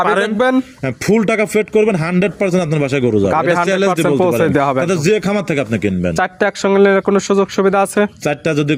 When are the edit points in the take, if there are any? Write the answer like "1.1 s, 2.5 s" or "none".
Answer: none

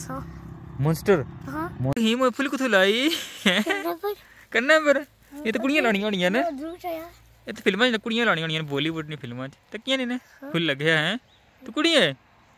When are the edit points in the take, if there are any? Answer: 1.9 s

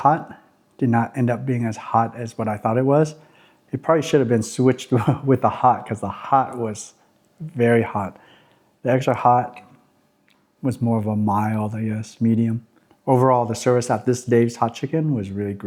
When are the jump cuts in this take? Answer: none

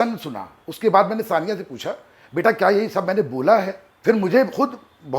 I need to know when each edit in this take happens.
3.8 s

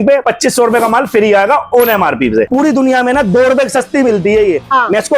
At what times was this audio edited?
2.5 s

